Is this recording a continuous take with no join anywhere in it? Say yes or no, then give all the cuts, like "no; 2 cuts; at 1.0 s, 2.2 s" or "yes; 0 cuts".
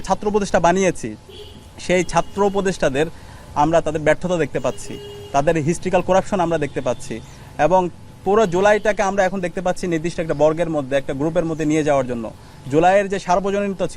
yes; 0 cuts